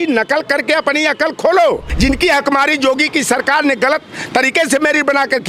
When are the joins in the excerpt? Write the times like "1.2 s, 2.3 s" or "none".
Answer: 1.9 s